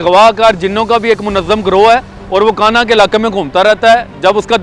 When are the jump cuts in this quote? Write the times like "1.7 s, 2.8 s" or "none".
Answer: none